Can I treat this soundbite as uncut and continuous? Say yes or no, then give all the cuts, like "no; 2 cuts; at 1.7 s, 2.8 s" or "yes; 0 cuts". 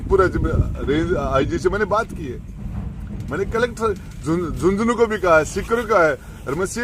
yes; 0 cuts